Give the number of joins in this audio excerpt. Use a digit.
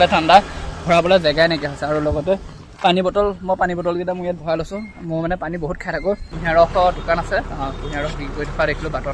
1